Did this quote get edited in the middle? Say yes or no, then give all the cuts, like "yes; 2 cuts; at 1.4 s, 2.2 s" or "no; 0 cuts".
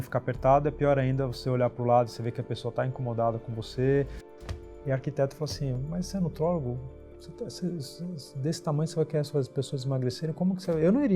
yes; 1 cut; at 4.3 s